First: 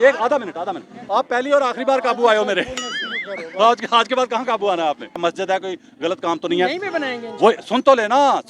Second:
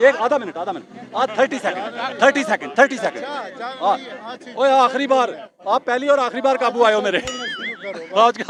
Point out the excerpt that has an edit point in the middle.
first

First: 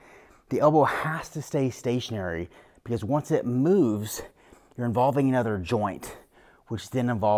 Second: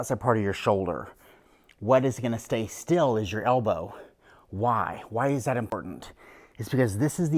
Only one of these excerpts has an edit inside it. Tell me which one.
second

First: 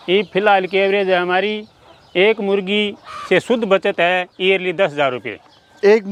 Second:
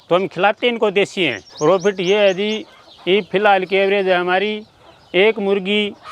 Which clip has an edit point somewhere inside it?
second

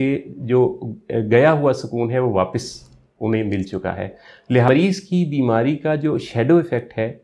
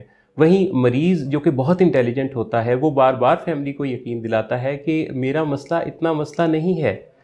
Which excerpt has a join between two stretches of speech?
first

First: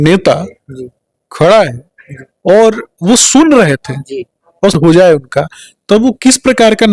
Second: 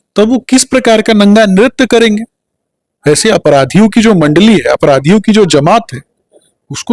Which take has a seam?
first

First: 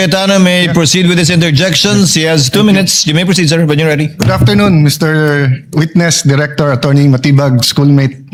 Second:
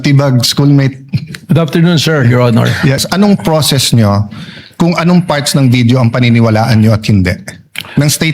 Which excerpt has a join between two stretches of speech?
second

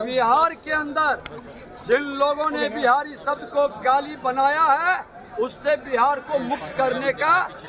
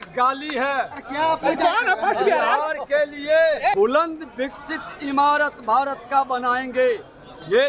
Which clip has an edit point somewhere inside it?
second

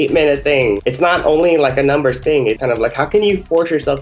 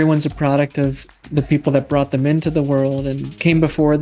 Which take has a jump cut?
first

